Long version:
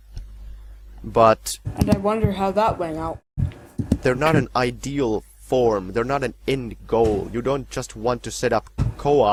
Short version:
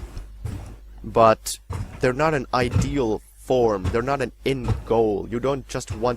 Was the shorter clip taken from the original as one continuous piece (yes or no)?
no